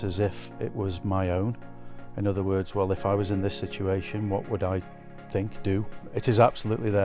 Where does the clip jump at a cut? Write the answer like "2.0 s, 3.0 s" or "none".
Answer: 6.1 s